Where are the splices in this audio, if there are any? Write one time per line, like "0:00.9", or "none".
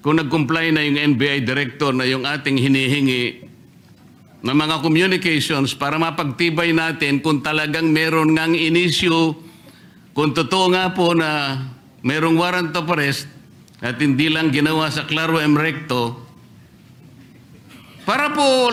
none